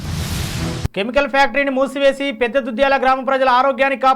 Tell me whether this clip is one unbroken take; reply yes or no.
no